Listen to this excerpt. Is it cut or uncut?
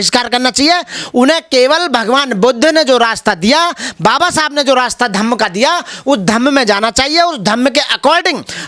uncut